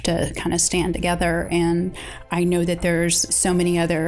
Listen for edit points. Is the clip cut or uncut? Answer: cut